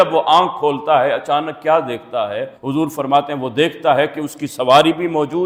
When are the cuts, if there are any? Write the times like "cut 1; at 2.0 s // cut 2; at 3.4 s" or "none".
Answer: none